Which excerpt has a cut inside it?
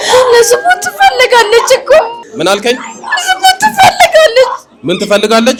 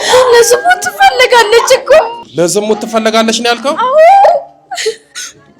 second; 1 cut; at 2.2 s

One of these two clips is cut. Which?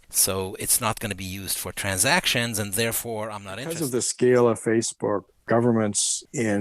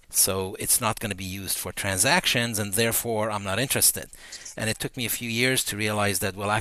first; 1 cut; at 3.8 s

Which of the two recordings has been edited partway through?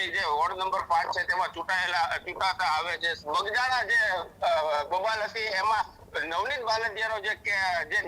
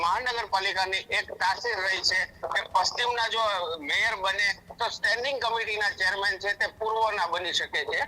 first; 1 cut; at 3.0 s

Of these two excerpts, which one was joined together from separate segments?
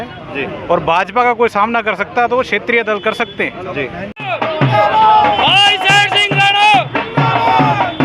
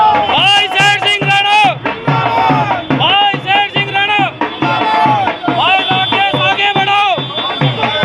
first; 1 cut; at 4.1 s

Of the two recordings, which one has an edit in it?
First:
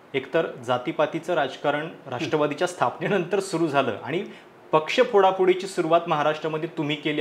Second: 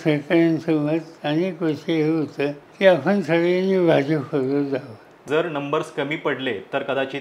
second; 2 cuts; at 2.6 s, 5.2 s

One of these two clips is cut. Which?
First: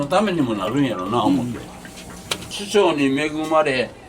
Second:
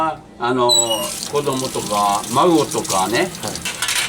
first; 1 cut; at 2.5 s

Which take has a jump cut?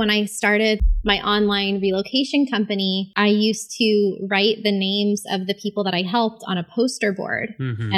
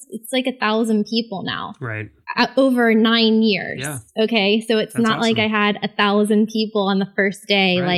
first; 2 cuts; at 0.8 s, 3.1 s

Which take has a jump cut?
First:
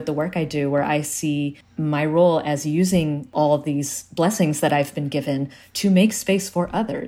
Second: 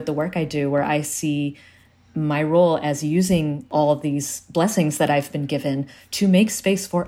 first; 1 cut; at 1.6 s

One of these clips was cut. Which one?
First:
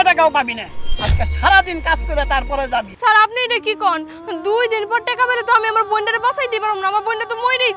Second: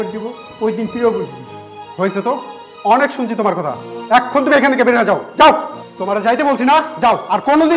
first; 1 cut; at 2.9 s

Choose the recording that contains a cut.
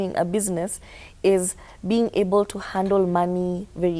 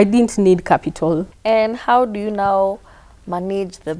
second; 1 cut; at 1.3 s

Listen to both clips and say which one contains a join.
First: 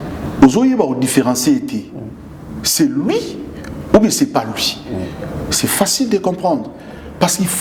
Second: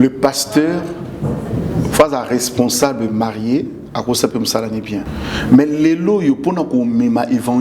second; 1 cut; at 5.1 s

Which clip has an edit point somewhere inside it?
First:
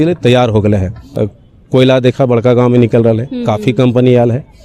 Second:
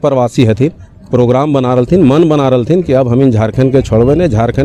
first; 1 cut; at 1.0 s

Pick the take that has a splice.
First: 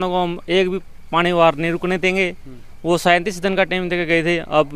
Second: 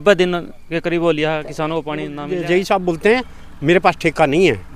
second; 1 cut; at 2.2 s

